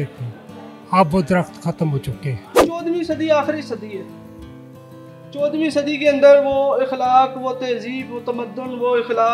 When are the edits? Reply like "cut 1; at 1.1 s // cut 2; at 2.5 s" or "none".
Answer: cut 1; at 2.6 s